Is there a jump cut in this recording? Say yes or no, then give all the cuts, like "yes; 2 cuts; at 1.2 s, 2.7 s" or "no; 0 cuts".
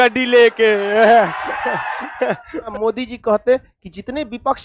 yes; 1 cut; at 2.7 s